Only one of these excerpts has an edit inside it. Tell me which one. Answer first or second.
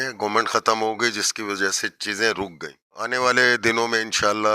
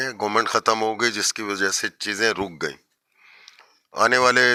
first